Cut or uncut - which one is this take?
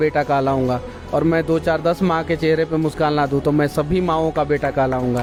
uncut